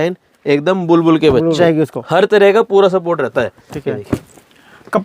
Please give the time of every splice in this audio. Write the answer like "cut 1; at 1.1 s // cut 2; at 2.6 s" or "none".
cut 1; at 1.6 s